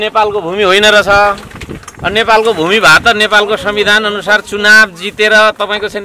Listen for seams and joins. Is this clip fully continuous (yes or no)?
yes